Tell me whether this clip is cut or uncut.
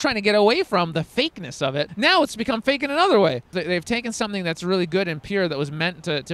cut